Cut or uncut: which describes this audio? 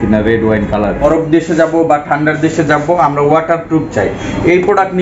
cut